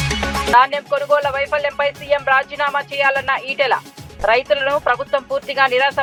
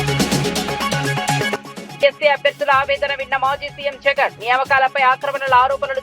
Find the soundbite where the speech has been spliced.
second; 1 cut; at 1.8 s

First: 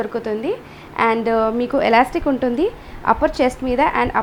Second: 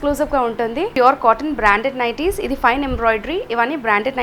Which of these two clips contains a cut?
second; 1 cut; at 0.9 s

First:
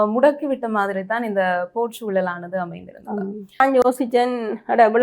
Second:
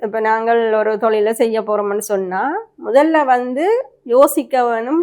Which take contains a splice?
first; 1 cut; at 3.6 s

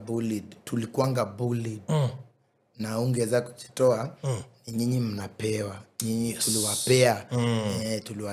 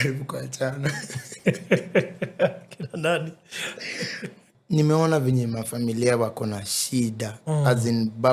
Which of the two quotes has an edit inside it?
second; 1 cut; at 4.5 s

